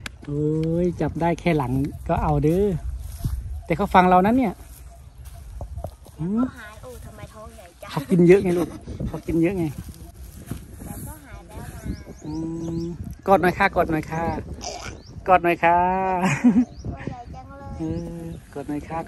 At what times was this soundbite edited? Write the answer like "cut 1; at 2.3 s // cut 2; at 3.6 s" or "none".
none